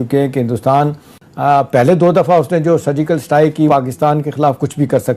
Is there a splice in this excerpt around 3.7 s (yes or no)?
yes